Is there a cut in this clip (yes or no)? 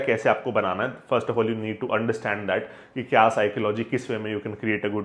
no